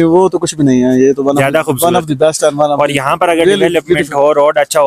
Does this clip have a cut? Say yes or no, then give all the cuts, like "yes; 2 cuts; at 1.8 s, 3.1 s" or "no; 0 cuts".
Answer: no; 0 cuts